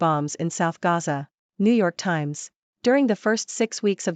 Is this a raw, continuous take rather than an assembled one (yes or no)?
yes